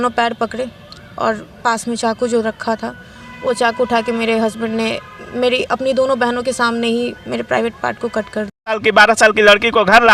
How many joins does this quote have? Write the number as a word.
one